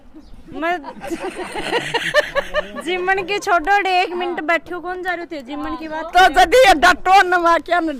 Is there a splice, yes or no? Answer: no